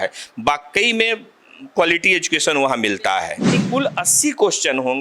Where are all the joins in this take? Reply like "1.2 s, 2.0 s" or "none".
3.6 s